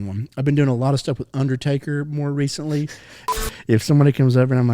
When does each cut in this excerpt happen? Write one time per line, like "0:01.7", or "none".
0:03.3

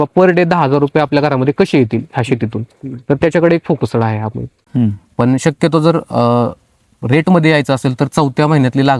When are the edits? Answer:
0:04.6

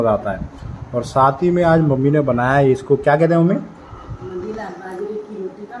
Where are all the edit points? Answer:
none

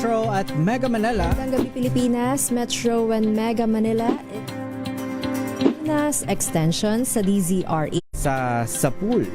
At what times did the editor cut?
0:08.0

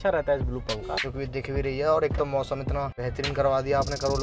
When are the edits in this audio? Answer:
0:01.5
0:03.0

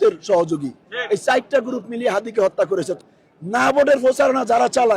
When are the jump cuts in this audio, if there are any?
0:03.0

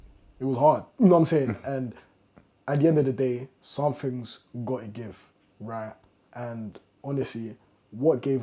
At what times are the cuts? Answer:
none

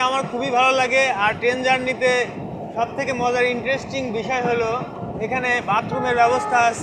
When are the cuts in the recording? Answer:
none

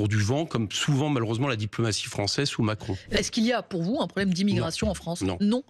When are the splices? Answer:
0:03.2

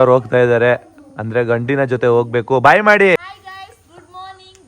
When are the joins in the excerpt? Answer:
0:03.2

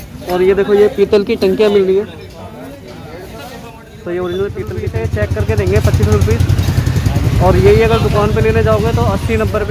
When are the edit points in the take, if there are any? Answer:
0:04.9

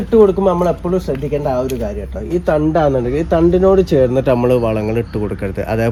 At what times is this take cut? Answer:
none

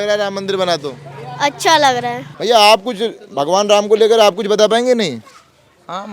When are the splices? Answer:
none

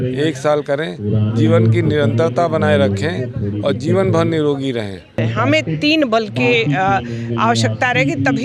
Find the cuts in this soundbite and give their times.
0:05.2

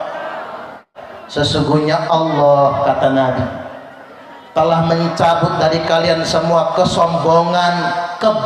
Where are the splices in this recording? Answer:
0:01.0

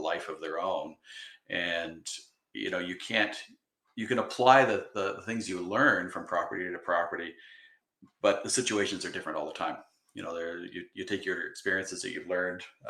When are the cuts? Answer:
none

